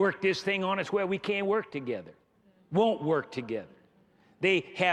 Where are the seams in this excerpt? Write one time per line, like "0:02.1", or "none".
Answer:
none

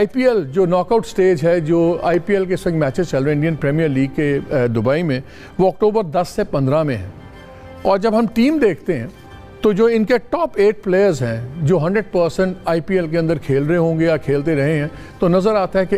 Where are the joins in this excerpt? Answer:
none

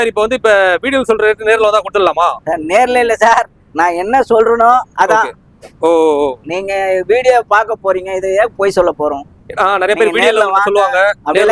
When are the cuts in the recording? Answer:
none

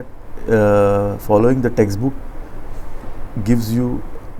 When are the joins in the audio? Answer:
none

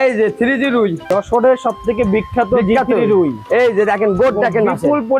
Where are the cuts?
0:01.1

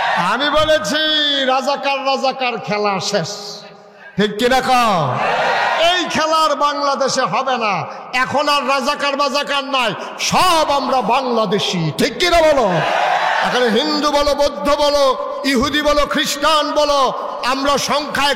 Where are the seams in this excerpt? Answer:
none

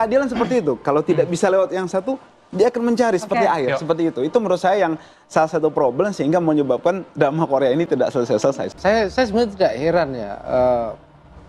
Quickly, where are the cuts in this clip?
0:08.7

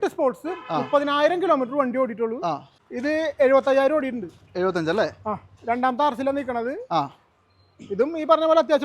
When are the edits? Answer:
0:02.8

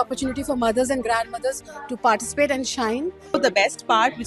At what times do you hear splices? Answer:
0:03.4

